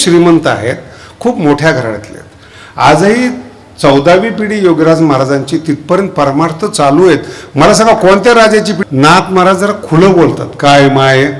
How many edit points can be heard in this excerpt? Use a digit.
1